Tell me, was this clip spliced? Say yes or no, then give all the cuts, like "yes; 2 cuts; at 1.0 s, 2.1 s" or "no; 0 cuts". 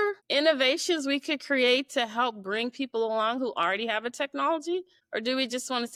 no; 0 cuts